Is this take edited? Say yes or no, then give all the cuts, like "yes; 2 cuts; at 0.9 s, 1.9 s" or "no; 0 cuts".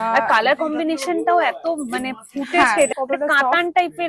yes; 1 cut; at 2.9 s